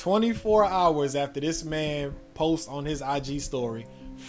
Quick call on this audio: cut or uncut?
uncut